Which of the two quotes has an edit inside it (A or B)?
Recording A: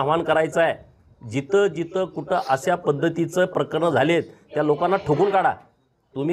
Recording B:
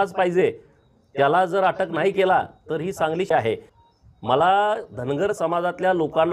B